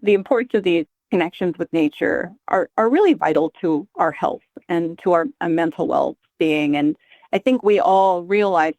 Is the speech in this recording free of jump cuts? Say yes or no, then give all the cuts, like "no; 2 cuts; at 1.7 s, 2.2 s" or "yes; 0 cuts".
no; 1 cut; at 1.0 s